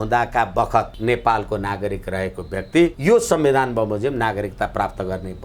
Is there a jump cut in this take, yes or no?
yes